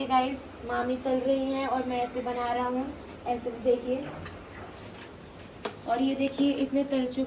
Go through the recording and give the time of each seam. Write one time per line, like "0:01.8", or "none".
none